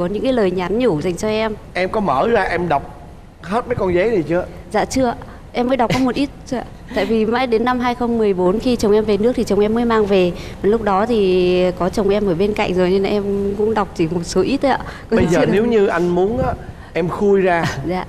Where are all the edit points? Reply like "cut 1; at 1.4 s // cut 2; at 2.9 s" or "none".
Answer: none

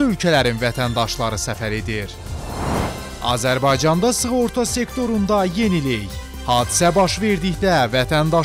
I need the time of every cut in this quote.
cut 1; at 2.6 s

